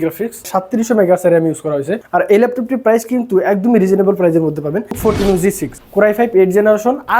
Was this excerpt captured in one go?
no; 3 cuts; at 2.0 s, 4.9 s, 5.7 s

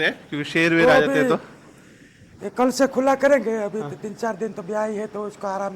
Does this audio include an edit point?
no; 0 cuts

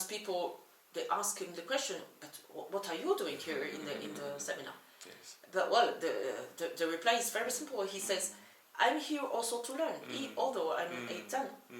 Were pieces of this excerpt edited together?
no; 0 cuts

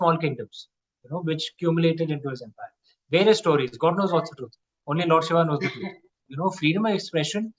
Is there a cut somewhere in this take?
yes; 1 cut; at 6.3 s

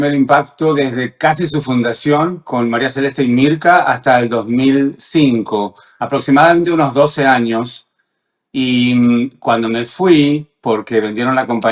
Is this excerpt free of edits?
yes; 0 cuts

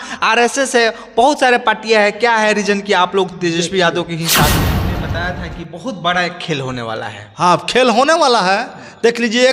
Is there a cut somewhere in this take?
yes; 1 cut; at 4.6 s

